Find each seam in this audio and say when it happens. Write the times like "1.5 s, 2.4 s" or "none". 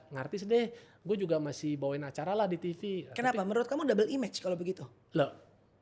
none